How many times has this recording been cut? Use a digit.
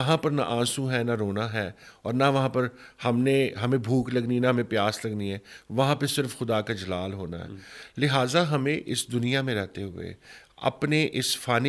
0